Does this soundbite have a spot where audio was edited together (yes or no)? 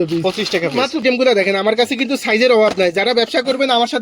yes